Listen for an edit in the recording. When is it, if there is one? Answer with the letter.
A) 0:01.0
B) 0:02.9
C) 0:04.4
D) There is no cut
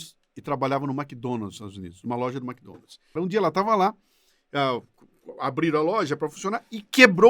B